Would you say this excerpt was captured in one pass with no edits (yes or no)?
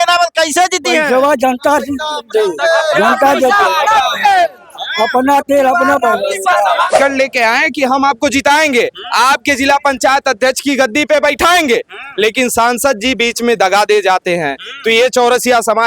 no